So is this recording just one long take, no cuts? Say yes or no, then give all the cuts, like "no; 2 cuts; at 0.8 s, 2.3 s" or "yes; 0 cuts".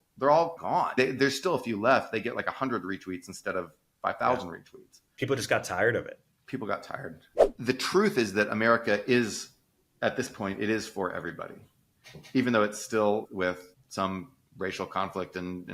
no; 2 cuts; at 7.3 s, 13.2 s